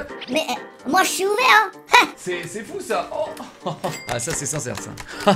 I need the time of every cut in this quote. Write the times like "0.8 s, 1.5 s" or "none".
2.2 s, 4.0 s